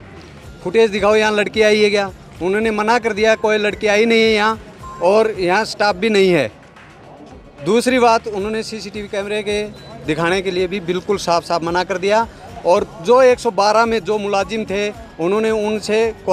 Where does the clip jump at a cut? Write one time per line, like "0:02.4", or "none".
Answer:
none